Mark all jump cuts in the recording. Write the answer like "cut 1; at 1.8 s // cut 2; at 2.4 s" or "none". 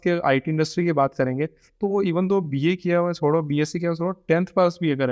none